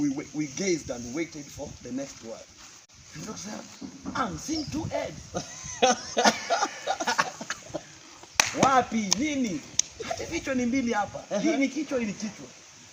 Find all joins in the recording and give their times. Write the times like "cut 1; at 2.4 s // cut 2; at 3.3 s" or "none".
none